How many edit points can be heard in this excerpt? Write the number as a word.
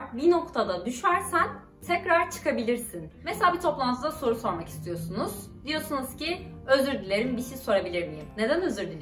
one